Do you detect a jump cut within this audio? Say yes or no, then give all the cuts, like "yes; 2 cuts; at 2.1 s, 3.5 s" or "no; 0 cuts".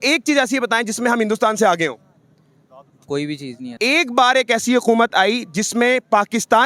yes; 1 cut; at 3.6 s